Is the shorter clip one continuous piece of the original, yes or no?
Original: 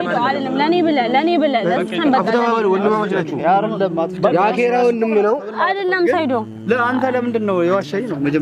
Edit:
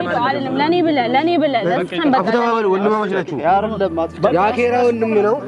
yes